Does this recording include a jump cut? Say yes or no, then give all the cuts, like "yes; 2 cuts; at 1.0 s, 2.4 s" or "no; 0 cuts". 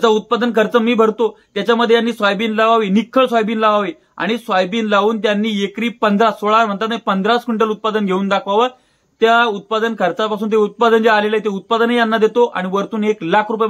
no; 0 cuts